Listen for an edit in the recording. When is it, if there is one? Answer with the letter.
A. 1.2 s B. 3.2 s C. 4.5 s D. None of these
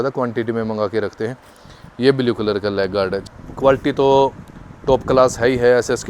B